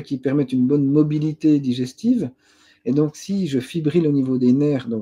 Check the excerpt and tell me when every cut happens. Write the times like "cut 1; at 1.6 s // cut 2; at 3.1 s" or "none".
none